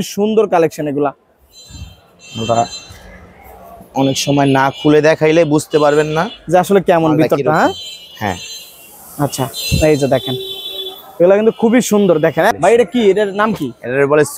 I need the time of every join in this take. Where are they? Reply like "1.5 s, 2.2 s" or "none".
12.6 s

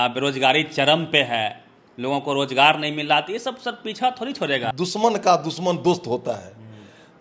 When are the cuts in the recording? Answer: 4.7 s

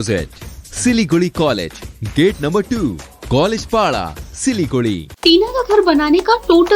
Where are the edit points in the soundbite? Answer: 5.1 s

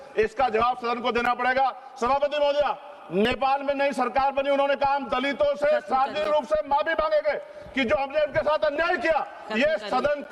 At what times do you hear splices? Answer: none

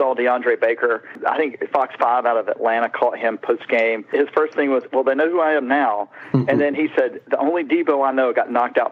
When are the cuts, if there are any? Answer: 1.1 s, 4.1 s

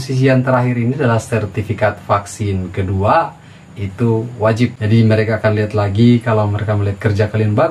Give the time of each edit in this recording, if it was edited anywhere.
4.8 s

